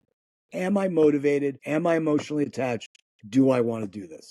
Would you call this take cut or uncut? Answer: cut